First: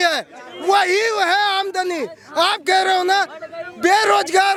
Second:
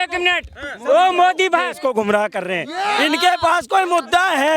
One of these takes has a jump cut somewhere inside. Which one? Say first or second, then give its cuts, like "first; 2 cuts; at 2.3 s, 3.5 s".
second; 1 cut; at 1.8 s